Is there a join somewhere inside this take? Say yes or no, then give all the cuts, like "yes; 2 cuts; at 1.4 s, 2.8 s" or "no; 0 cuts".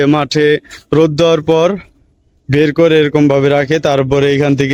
no; 0 cuts